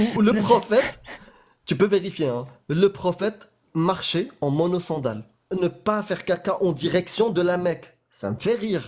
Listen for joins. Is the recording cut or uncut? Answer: cut